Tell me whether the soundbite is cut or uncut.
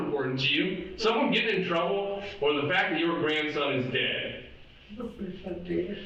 uncut